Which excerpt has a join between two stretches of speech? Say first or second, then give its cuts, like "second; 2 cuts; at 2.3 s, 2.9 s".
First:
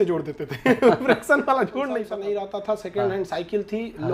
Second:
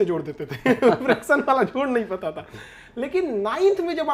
first; 1 cut; at 2.0 s